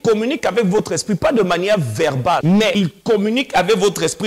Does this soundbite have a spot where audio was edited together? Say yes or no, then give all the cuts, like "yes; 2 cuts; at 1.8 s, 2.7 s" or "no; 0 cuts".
yes; 1 cut; at 2.6 s